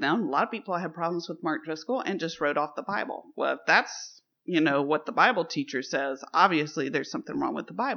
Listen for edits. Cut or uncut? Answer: uncut